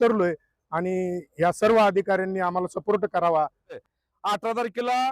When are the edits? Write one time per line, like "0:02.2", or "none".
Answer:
0:03.8

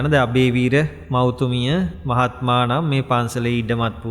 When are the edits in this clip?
0:01.0
0:02.0

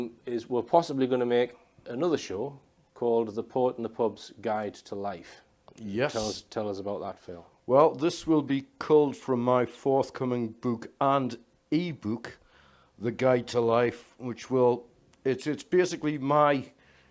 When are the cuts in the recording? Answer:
0:02.5

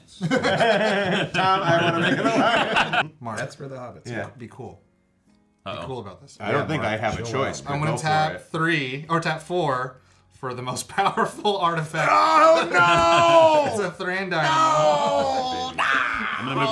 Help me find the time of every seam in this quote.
0:03.0

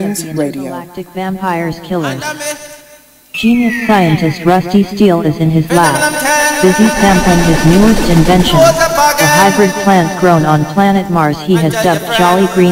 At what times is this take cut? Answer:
0:01.0

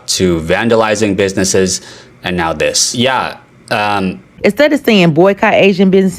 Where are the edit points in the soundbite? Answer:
0:04.3

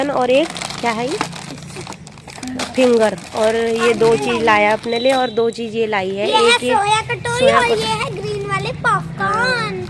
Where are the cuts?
none

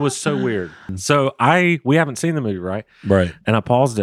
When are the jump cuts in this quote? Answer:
0:00.9

